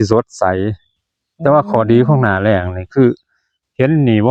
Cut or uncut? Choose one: uncut